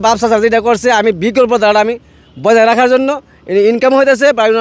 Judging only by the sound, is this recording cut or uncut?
uncut